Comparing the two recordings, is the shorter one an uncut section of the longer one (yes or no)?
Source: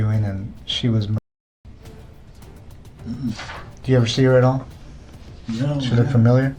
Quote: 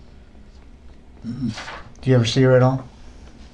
yes